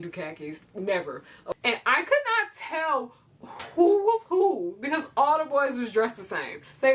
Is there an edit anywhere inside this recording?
yes; 1 cut; at 1.5 s

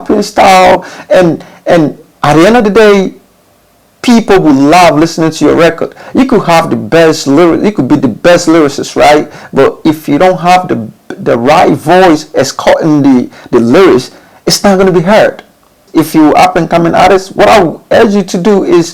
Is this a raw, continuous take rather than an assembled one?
no; 1 cut; at 15.8 s

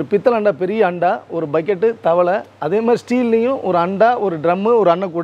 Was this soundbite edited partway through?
no; 0 cuts

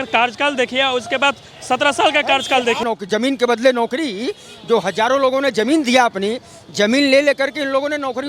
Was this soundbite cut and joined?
yes; 1 cut; at 2.8 s

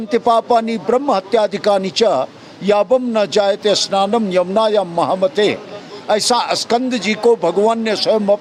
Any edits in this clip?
no; 0 cuts

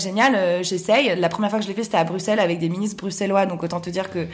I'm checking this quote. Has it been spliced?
no; 0 cuts

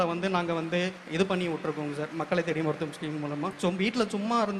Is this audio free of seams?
no; 2 cuts; at 1.0 s, 3.5 s

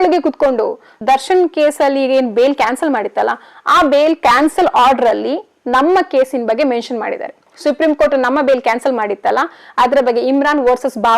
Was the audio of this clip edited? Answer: yes; 1 cut; at 0.9 s

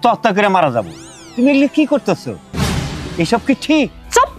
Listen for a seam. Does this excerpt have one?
no; 0 cuts

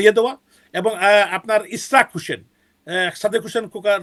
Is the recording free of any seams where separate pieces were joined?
yes; 0 cuts

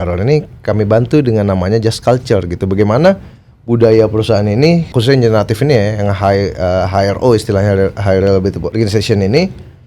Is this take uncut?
no; 2 cuts; at 4.9 s, 8.6 s

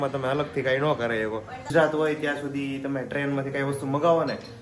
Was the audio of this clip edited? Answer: yes; 1 cut; at 1.7 s

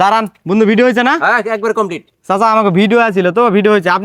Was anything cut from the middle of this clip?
no; 0 cuts

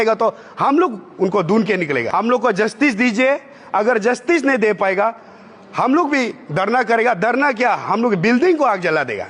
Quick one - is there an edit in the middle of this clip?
yes; 1 cut; at 2.0 s

